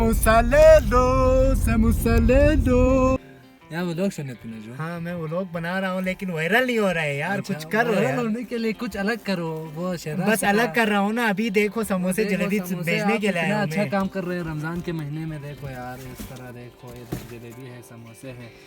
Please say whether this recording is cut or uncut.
cut